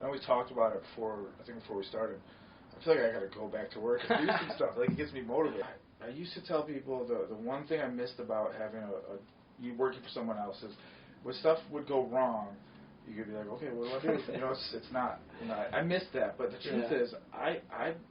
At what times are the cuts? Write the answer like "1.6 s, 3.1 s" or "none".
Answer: 5.8 s